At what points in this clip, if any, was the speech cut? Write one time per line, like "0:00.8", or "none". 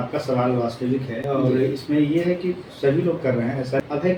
none